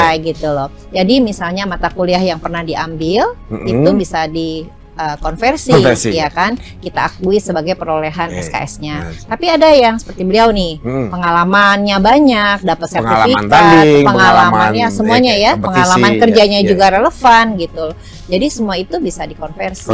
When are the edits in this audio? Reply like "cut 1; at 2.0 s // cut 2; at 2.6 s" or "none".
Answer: none